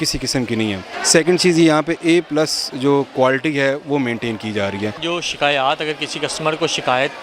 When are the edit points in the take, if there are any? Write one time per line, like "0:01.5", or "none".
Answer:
0:00.9
0:05.0